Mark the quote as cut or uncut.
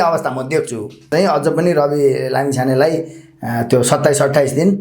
cut